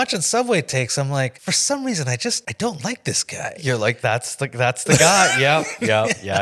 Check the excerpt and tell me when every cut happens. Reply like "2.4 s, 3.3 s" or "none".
1.4 s, 2.5 s, 4.0 s